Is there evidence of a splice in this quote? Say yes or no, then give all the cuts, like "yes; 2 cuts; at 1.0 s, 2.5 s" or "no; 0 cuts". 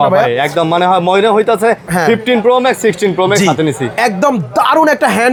no; 0 cuts